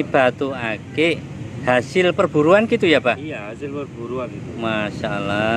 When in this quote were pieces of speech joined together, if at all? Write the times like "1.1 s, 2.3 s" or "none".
none